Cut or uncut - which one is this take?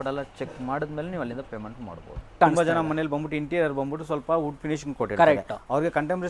cut